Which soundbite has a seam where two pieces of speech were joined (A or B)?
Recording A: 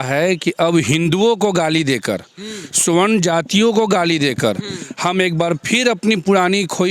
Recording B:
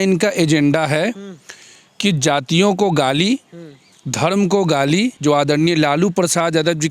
B